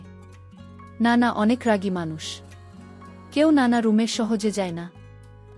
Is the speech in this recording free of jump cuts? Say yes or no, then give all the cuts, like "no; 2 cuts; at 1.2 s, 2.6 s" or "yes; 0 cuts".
yes; 0 cuts